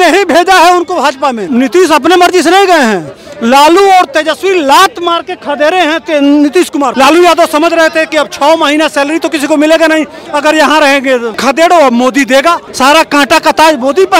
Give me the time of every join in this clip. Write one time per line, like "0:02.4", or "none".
0:01.4
0:06.9
0:11.3
0:12.7